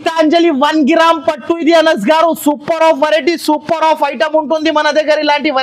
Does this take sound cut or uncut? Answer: uncut